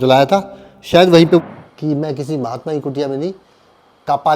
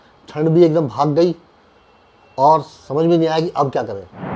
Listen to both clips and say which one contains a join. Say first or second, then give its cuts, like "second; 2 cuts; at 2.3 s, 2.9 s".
first; 1 cut; at 1.4 s